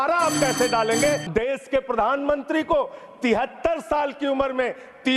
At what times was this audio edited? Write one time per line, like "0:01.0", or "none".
0:01.2